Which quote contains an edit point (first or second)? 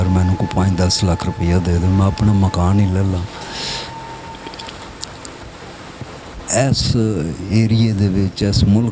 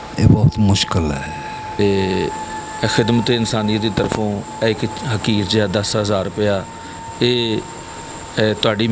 second